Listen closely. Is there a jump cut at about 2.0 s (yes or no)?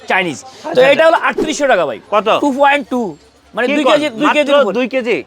yes